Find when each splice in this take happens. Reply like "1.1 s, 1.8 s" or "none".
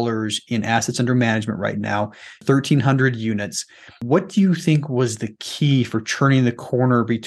none